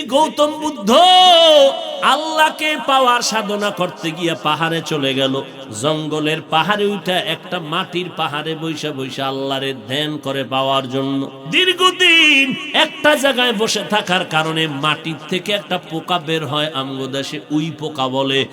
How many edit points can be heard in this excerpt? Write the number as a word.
three